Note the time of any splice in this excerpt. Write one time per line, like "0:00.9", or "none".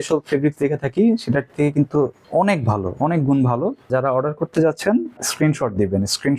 0:02.2
0:03.9
0:05.2